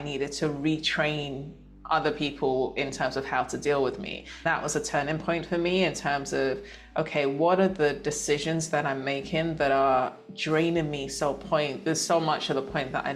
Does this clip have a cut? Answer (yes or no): no